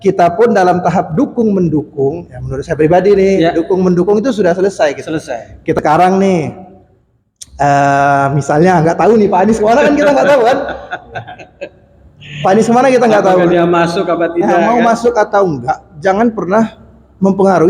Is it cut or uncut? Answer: cut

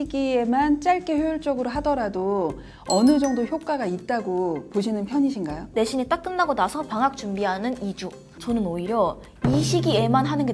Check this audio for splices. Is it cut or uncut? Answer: cut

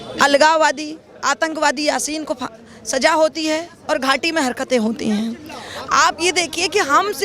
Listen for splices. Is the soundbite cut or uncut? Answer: uncut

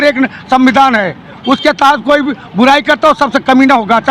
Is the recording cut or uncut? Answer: uncut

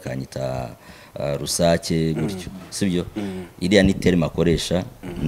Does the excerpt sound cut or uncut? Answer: uncut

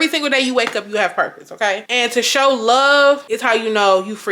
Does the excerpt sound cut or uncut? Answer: cut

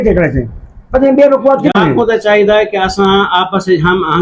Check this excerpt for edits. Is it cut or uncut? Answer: cut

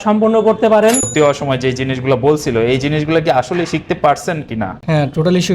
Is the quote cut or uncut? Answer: cut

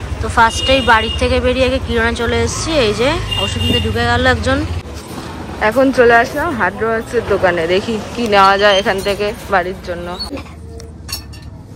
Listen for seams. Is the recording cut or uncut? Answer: uncut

